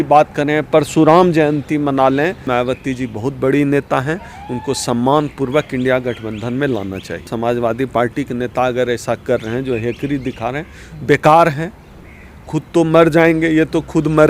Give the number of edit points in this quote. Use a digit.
2